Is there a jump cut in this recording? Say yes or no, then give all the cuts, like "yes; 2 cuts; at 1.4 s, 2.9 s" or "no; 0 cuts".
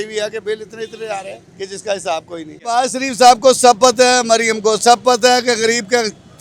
yes; 2 cuts; at 1.4 s, 2.8 s